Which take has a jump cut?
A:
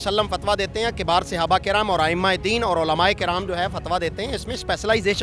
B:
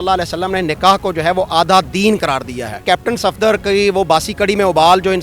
B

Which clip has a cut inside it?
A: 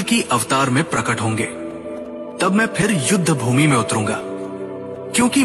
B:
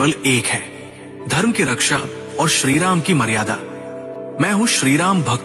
A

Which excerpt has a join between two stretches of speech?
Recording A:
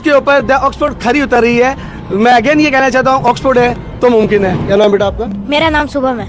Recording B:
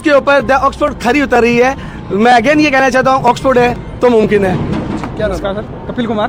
A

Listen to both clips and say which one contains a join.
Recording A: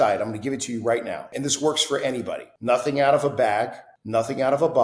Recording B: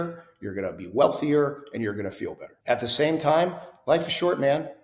A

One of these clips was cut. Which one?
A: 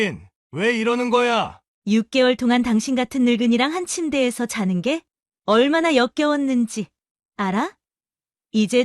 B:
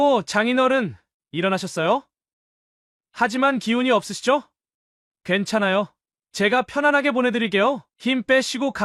A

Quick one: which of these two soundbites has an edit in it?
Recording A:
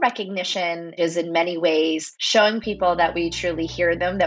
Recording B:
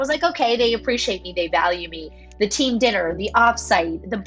A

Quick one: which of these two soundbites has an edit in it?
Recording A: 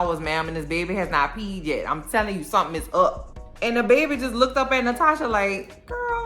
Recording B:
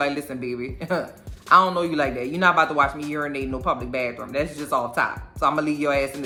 A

